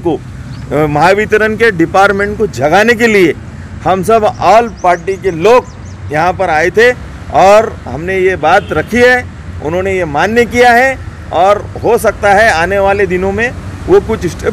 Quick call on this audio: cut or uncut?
uncut